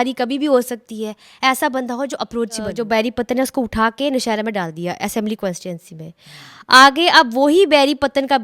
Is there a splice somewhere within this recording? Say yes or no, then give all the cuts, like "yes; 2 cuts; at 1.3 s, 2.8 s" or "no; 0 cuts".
yes; 1 cut; at 2.7 s